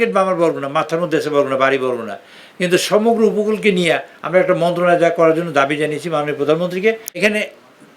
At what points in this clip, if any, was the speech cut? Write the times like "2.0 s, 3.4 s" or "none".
7.1 s